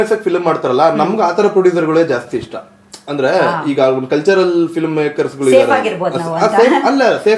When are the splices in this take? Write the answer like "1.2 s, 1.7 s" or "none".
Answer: none